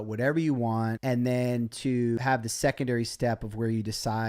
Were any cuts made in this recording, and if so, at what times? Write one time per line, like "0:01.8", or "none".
0:02.2